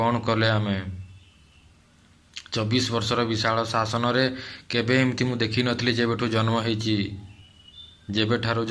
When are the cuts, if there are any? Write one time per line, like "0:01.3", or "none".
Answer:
none